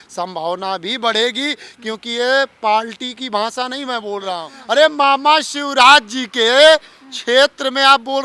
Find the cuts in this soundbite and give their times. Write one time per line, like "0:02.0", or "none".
0:04.5